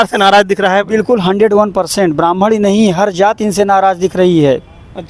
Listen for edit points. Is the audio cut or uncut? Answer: uncut